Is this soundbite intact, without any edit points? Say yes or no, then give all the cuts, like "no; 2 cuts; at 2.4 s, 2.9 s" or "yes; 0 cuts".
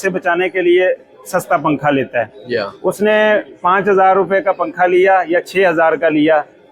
yes; 0 cuts